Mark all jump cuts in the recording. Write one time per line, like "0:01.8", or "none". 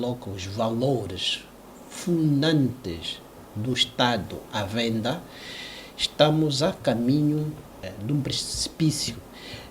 0:07.8